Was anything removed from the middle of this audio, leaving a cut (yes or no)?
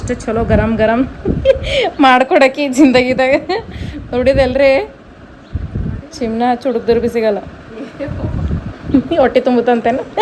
no